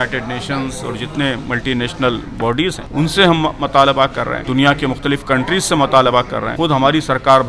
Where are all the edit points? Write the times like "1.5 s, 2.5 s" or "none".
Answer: 2.8 s, 4.4 s, 6.4 s